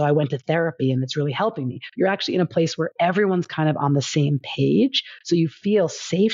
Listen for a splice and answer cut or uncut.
uncut